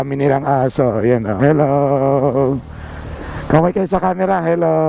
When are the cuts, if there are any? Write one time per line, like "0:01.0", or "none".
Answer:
0:01.4